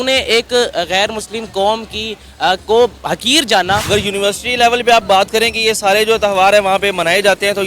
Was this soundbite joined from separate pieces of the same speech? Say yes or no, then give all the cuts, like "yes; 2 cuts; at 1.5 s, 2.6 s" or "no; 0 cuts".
yes; 1 cut; at 3.8 s